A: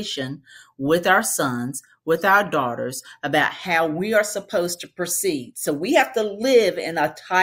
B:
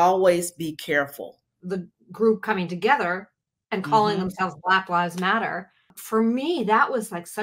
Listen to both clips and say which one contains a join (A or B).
B